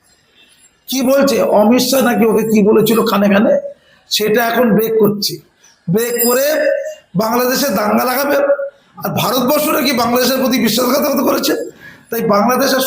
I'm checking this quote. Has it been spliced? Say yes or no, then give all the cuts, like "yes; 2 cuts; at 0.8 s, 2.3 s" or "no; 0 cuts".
no; 0 cuts